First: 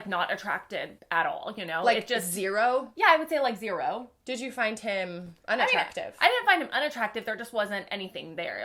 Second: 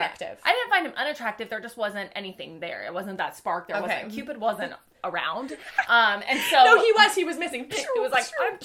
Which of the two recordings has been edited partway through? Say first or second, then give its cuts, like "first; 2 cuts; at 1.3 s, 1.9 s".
first; 1 cut; at 1.0 s